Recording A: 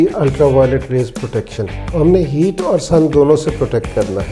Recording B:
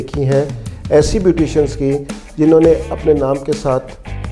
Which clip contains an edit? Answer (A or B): A